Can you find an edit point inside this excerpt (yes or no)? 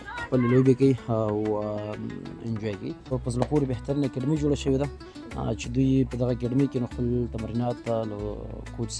yes